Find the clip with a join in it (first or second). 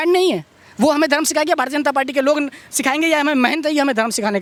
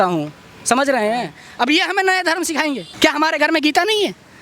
second